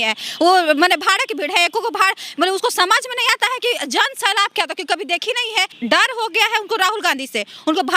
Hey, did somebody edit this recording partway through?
yes; 1 cut; at 5.7 s

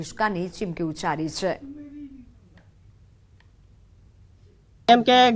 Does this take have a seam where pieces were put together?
no; 0 cuts

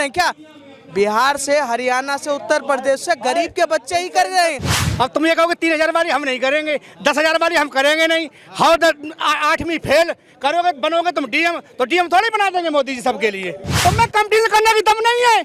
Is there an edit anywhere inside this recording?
yes; 2 cuts; at 4.8 s, 13.7 s

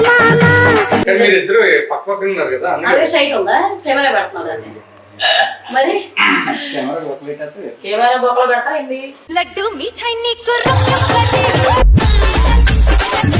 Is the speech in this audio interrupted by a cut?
yes; 1 cut; at 1.0 s

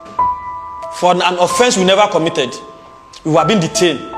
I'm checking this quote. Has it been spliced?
yes; 1 cut; at 1.0 s

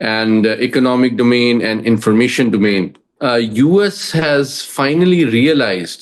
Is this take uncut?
no; 1 cut; at 3.0 s

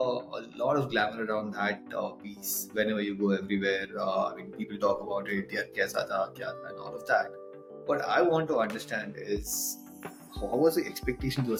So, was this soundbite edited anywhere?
no; 0 cuts

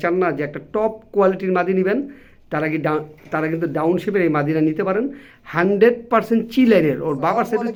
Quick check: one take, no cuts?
yes; 0 cuts

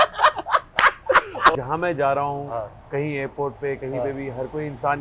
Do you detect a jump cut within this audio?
yes; 1 cut; at 1.5 s

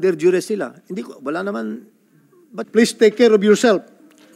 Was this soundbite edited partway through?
yes; 1 cut; at 2.6 s

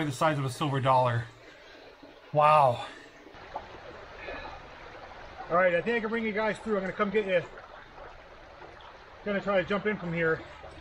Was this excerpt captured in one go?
no; 1 cut; at 3.4 s

